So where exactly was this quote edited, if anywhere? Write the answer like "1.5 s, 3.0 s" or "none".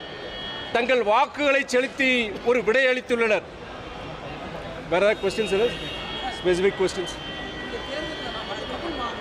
none